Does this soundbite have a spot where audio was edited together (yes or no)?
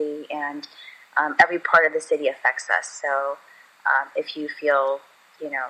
no